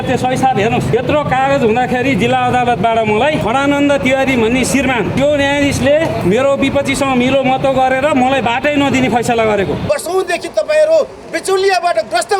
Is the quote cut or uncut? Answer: cut